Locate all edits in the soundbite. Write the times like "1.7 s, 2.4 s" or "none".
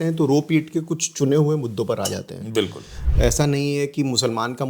2.9 s